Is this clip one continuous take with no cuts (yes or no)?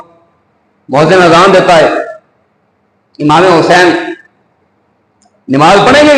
yes